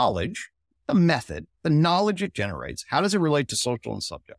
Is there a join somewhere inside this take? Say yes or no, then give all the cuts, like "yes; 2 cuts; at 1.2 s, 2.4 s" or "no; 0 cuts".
no; 0 cuts